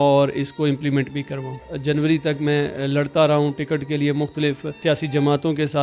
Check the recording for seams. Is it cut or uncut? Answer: cut